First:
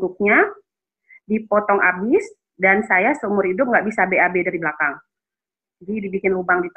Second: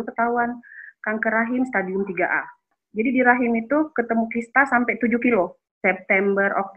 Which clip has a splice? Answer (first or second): second